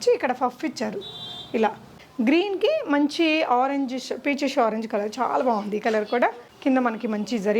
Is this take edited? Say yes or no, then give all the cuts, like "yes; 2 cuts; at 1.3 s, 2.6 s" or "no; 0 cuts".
yes; 2 cuts; at 2.0 s, 6.5 s